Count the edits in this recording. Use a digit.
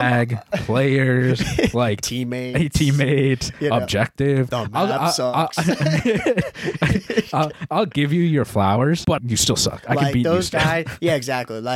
1